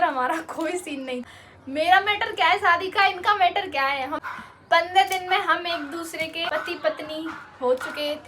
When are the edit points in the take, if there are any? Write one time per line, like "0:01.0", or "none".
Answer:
0:01.2
0:04.2
0:06.5

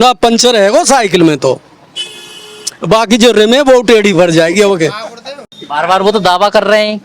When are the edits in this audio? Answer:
none

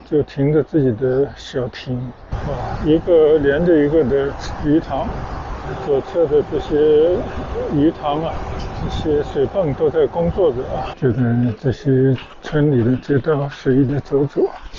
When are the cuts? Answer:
0:02.3
0:10.9

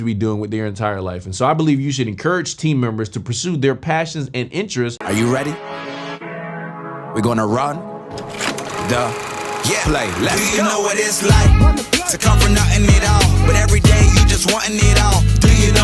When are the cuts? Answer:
0:05.0

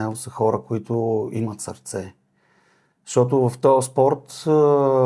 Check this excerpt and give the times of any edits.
none

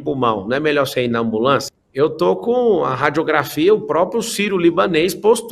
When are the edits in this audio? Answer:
0:01.7

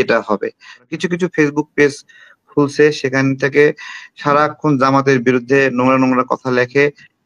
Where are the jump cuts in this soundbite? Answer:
0:00.9

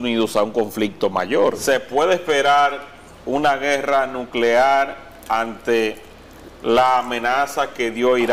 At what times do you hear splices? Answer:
0:01.6

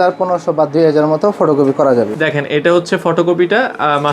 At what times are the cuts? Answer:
0:02.1

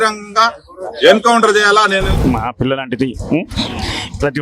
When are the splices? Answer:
0:02.1

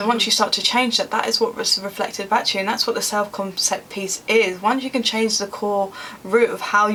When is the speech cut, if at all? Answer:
none

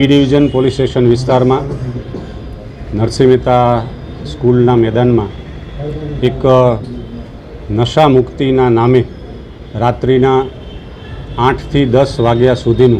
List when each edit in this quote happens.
none

